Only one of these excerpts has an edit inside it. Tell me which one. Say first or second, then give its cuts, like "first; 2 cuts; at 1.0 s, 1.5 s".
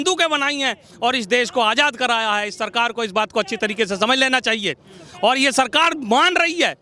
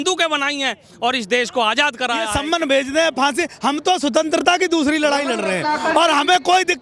second; 1 cut; at 2.4 s